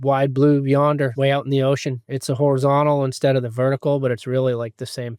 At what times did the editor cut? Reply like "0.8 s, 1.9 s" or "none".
1.1 s